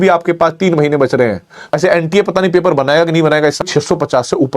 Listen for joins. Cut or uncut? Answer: cut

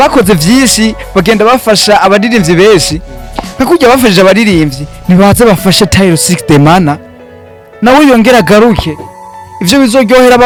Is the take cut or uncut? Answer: uncut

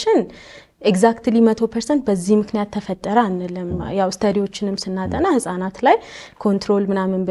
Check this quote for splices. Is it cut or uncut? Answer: uncut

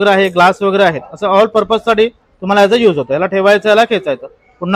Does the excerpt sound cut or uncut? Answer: uncut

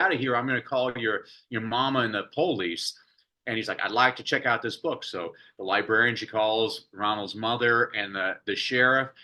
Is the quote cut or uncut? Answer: uncut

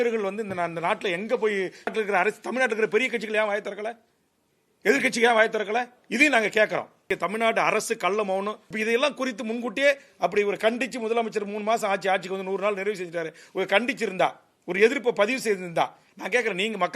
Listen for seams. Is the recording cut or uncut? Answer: cut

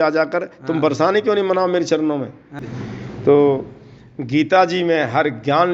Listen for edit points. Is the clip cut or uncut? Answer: cut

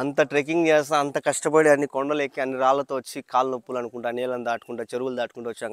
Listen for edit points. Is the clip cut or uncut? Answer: uncut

